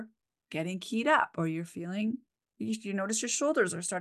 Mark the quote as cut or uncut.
uncut